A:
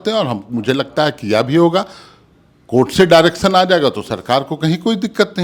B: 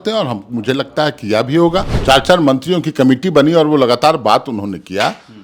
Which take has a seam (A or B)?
B